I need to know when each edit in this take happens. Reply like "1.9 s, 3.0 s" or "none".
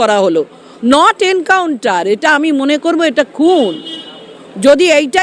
none